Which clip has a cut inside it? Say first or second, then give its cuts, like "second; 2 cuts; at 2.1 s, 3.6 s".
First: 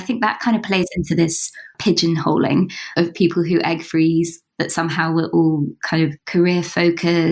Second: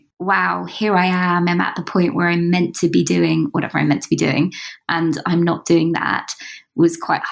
first; 4 cuts; at 1.7 s, 2.9 s, 4.4 s, 6.2 s